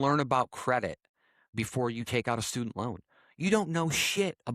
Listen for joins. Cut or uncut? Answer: cut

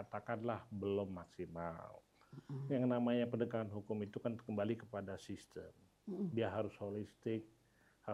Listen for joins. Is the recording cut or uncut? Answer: uncut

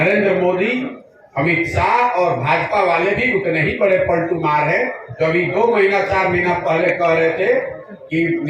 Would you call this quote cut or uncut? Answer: uncut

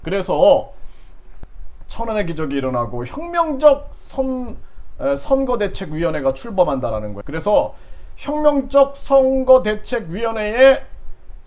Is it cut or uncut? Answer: uncut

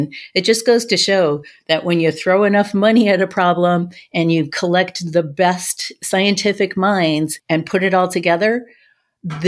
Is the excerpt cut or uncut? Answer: cut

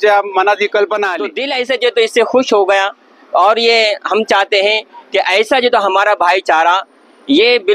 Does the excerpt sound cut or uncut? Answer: cut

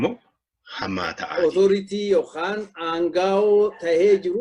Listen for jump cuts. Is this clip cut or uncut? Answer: cut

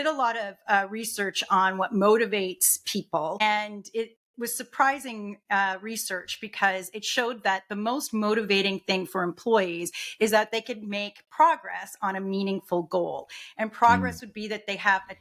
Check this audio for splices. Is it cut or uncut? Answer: uncut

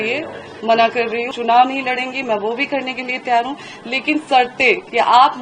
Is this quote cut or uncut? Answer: cut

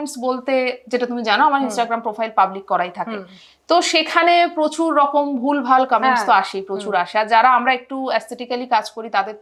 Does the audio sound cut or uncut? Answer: uncut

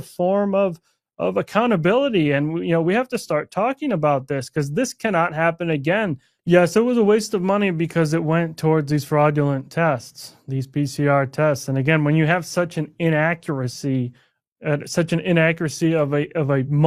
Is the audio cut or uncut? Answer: cut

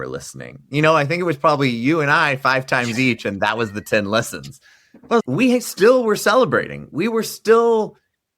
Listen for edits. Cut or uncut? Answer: cut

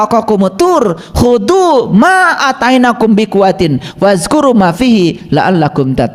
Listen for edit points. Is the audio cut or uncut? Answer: uncut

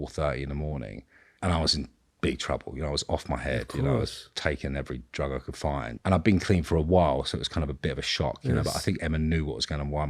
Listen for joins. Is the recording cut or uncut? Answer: uncut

